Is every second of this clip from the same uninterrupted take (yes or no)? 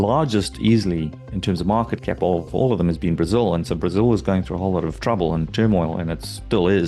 yes